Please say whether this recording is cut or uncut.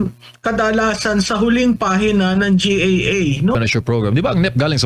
cut